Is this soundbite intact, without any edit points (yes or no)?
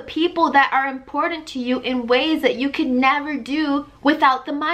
yes